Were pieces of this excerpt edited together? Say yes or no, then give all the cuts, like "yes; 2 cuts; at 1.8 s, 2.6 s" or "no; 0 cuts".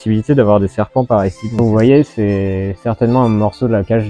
yes; 1 cut; at 1.6 s